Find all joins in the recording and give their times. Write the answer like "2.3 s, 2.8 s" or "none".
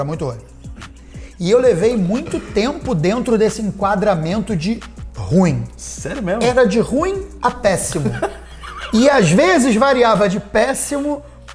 none